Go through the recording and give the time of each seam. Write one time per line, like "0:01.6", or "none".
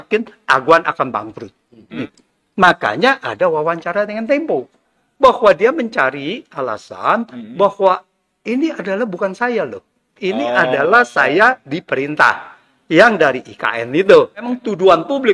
0:02.0
0:05.0
0:14.5